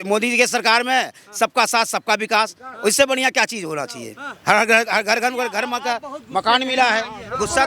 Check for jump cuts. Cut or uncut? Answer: uncut